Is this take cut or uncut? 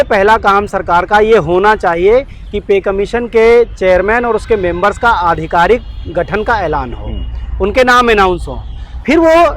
uncut